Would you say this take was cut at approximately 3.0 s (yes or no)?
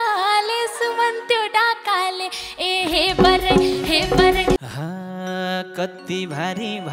no